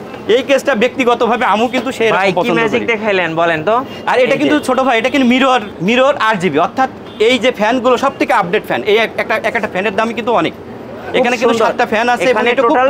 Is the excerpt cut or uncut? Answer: cut